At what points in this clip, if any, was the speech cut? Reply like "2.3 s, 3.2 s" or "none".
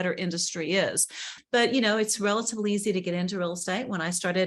1.4 s